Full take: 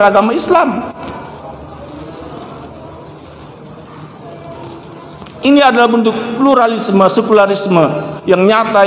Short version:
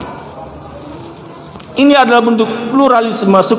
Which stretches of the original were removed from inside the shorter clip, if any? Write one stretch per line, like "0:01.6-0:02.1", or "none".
0:02.0-0:04.6

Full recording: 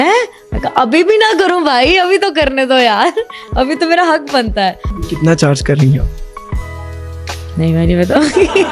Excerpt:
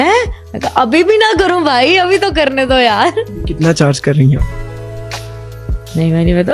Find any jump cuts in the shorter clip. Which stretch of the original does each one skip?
0:03.4-0:05.0

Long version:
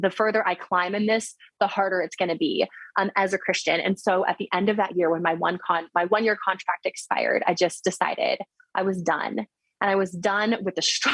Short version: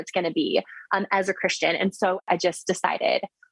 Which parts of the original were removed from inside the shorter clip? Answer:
0:04.3-0:07.4

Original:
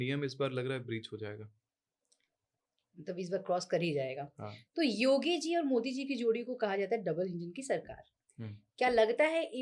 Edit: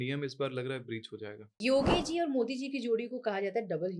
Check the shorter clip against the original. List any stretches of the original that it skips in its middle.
0:01.6-0:05.0

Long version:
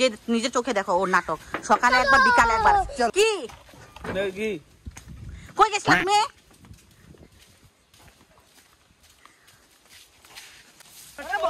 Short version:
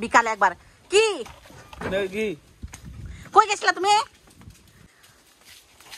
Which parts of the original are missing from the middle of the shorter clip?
0:07.1-0:09.3

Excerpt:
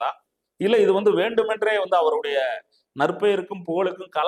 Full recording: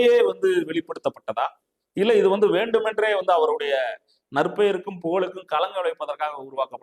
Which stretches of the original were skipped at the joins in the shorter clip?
none

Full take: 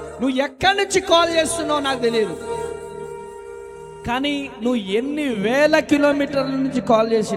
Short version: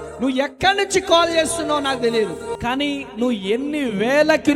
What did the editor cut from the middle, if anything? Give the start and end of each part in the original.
0:02.5-0:04.0

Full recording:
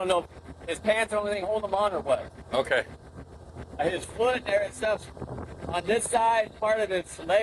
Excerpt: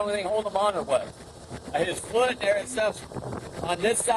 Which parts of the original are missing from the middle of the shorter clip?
0:02.4-0:03.2

